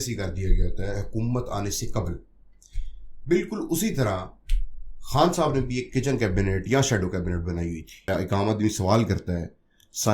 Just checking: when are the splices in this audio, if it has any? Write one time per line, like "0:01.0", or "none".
0:08.1